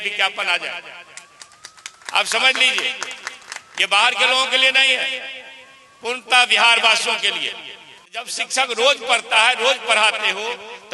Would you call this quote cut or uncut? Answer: cut